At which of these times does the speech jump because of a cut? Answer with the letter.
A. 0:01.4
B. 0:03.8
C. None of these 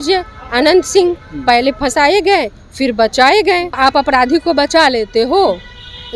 B